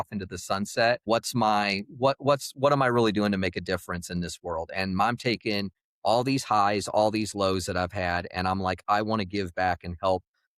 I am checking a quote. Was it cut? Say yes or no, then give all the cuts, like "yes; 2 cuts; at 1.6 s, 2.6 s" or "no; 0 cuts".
yes; 1 cut; at 1.0 s